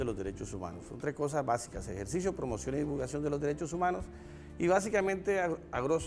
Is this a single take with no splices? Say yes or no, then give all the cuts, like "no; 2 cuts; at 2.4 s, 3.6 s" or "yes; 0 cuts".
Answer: yes; 0 cuts